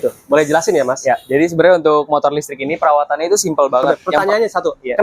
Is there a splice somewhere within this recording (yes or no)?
yes